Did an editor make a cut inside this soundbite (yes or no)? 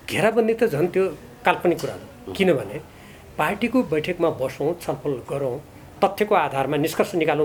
no